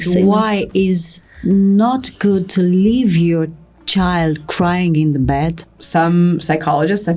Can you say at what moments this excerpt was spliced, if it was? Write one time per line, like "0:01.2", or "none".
0:05.5